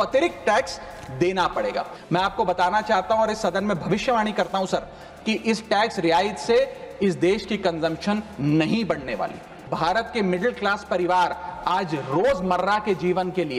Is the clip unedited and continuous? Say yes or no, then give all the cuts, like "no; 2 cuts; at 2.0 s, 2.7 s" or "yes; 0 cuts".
no; 2 cuts; at 2.0 s, 9.7 s